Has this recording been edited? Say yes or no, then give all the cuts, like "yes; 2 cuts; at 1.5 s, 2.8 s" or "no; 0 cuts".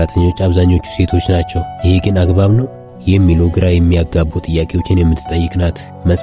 no; 0 cuts